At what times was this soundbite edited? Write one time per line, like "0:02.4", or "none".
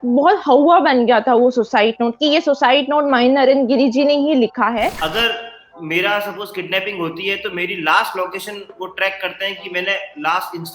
0:05.0